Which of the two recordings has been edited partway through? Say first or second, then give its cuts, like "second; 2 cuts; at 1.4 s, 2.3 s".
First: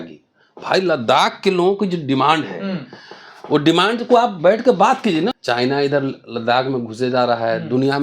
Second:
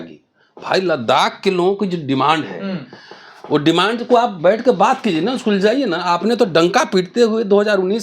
first; 1 cut; at 5.4 s